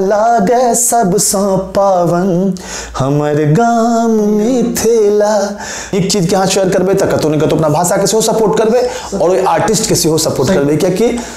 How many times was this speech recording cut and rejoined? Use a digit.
1